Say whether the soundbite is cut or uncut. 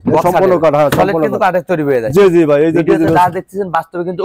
uncut